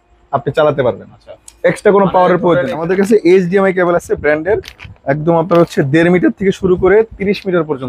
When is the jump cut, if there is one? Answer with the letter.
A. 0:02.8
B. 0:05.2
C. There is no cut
A